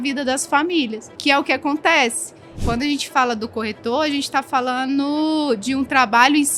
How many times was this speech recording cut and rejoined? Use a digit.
2